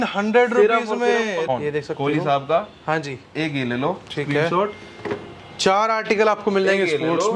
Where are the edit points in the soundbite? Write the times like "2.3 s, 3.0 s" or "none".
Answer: 1.5 s